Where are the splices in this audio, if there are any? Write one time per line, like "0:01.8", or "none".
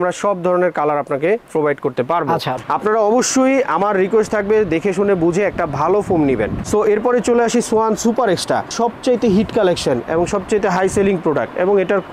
0:02.6
0:06.6
0:08.7